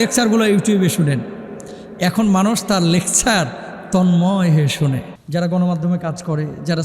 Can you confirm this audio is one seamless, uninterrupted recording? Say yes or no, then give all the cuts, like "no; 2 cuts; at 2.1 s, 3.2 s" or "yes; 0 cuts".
no; 1 cut; at 5.1 s